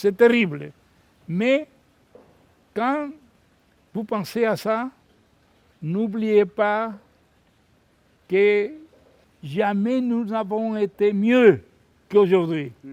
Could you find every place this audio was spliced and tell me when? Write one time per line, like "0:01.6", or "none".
none